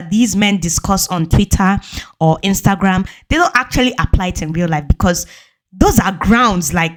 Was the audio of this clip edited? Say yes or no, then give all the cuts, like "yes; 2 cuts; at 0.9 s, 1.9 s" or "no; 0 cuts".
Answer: no; 0 cuts